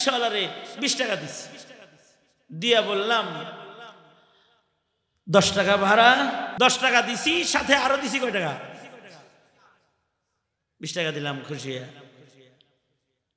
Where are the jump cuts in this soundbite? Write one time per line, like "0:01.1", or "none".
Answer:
0:06.5